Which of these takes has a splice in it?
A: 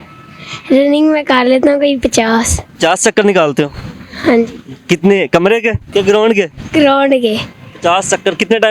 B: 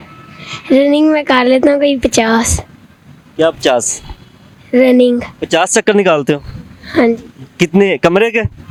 A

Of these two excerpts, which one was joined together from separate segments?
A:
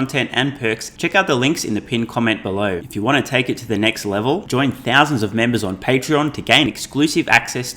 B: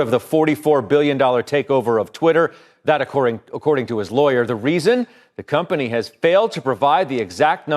A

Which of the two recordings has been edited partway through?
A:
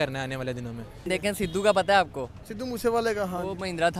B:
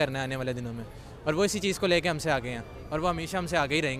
A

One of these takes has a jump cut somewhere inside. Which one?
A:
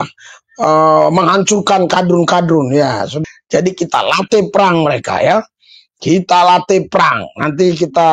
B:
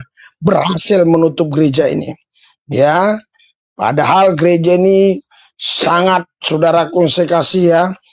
A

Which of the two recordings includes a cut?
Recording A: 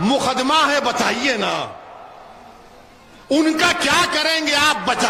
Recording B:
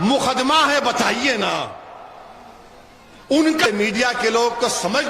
B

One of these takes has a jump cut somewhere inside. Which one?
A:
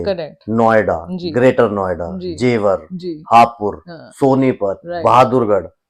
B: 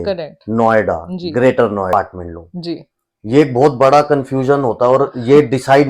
B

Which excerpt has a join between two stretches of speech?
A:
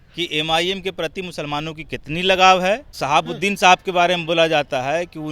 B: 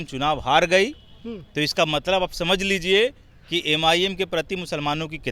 A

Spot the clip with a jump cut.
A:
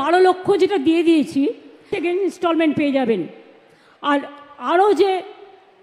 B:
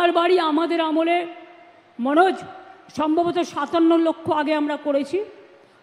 A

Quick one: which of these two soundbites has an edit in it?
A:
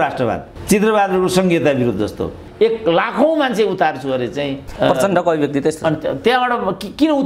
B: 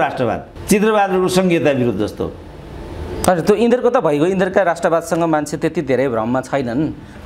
A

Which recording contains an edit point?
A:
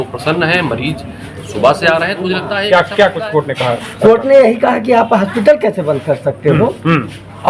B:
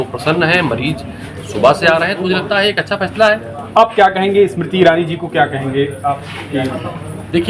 A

